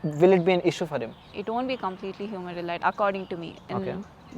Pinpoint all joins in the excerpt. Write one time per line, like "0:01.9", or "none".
0:01.3

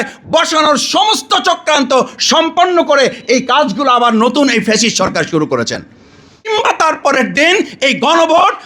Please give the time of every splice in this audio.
0:06.5

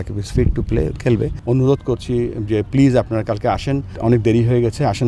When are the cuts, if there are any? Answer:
0:01.4
0:03.9

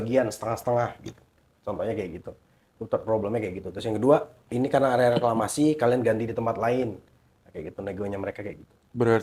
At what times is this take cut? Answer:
none

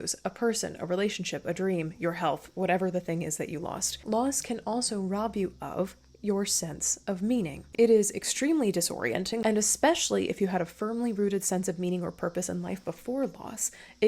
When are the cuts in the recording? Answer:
0:03.9
0:07.7
0:09.4

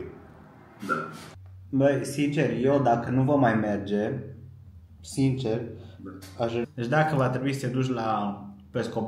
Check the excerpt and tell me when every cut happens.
0:01.2
0:06.6

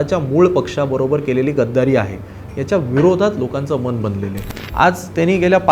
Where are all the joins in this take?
0:04.6

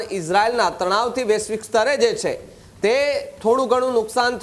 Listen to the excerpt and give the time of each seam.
none

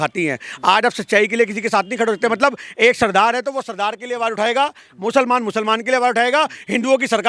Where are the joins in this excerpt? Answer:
none

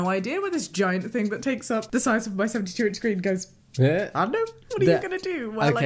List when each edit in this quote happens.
0:01.9
0:04.6

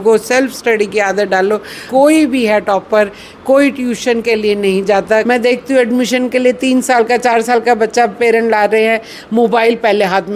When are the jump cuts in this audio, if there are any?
0:01.7
0:05.2

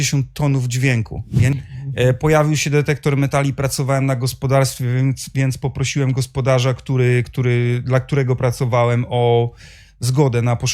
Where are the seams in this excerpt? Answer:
0:01.5

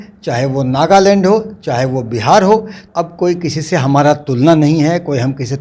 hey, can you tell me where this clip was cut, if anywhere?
0:02.8

